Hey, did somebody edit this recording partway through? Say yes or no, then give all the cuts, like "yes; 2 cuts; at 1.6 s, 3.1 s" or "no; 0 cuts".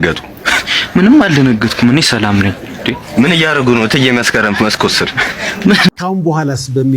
yes; 1 cut; at 5.9 s